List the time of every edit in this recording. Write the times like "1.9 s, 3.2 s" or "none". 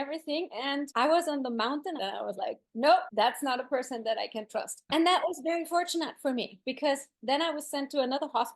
2.0 s